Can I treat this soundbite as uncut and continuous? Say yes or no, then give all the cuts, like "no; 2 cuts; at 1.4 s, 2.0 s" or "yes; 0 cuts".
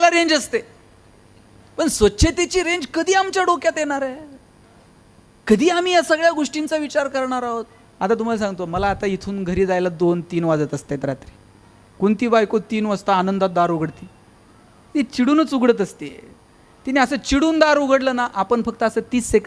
no; 1 cut; at 7.8 s